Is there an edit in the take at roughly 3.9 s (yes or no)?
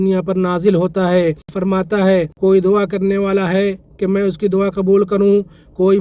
no